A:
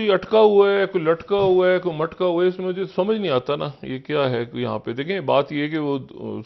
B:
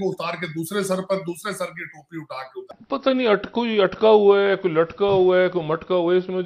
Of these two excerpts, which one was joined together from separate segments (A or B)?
B